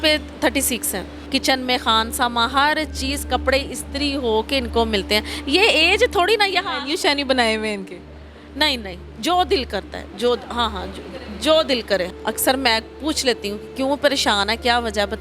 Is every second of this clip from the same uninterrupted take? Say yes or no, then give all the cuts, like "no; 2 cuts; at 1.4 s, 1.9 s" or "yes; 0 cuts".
no; 2 cuts; at 1.1 s, 12.1 s